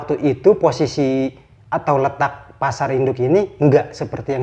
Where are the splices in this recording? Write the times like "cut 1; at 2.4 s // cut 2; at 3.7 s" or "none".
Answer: none